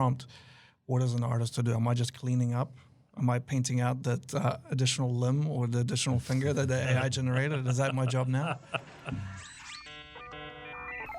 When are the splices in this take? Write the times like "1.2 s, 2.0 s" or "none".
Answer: 10.0 s